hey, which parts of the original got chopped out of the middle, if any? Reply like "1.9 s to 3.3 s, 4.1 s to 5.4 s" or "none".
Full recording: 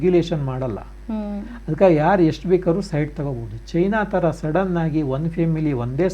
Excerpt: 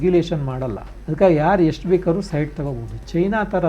0.9 s to 1.5 s